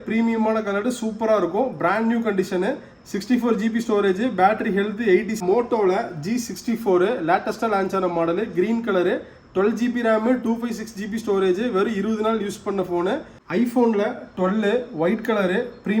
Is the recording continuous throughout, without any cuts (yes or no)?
no